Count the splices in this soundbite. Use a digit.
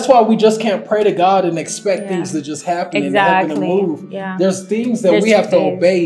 0